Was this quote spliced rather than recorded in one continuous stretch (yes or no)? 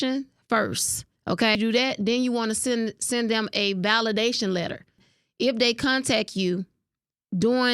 yes